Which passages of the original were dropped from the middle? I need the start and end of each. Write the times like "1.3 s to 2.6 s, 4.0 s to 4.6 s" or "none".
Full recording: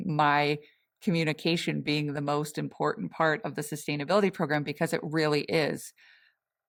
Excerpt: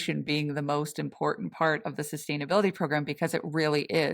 none